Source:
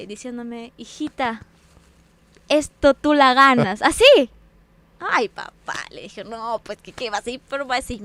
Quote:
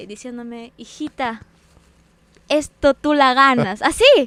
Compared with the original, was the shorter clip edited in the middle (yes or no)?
no